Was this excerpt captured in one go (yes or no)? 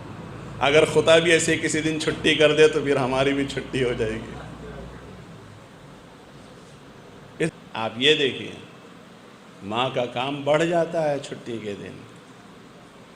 no